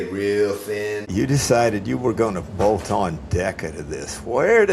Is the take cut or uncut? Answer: cut